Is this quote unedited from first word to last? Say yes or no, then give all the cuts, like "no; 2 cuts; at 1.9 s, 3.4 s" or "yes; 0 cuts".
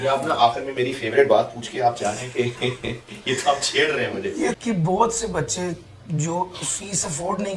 no; 1 cut; at 4.6 s